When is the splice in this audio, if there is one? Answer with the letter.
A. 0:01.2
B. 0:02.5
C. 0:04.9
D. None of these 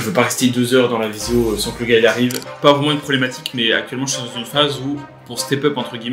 B